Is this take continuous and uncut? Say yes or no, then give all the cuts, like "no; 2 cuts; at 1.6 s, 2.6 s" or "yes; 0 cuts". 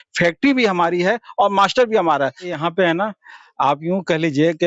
no; 1 cut; at 2.5 s